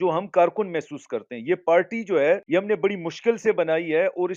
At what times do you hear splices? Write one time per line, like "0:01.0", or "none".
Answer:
0:02.4